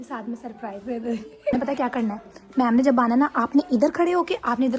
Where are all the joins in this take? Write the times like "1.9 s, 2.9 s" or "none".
1.5 s